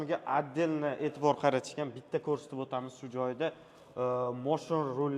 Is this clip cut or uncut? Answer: uncut